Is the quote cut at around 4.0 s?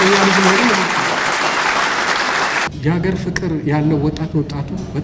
no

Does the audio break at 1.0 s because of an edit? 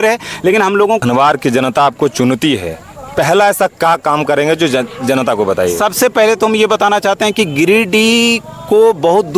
yes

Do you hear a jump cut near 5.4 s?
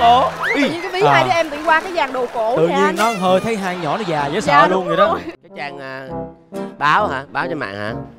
yes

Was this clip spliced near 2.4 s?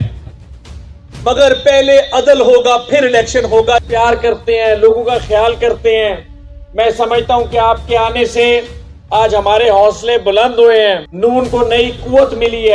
no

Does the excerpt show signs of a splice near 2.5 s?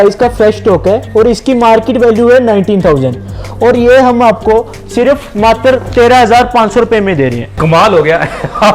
no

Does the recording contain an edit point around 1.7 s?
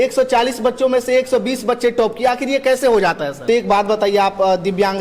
no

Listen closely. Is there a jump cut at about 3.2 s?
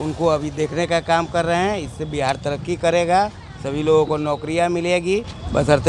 no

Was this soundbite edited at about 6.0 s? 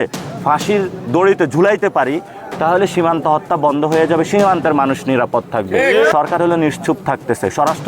yes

